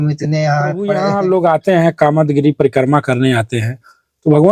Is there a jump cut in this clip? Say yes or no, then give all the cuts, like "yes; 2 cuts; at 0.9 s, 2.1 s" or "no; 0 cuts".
yes; 1 cut; at 0.9 s